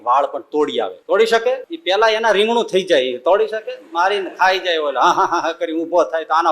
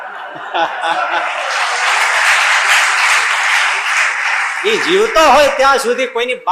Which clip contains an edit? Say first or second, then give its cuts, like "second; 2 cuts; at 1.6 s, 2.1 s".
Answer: first; 2 cuts; at 1.0 s, 1.7 s